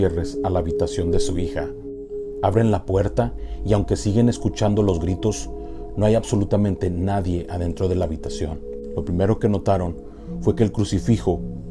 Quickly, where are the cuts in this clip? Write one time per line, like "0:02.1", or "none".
none